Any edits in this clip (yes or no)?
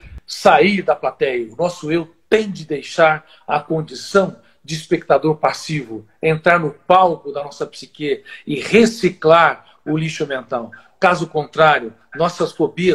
no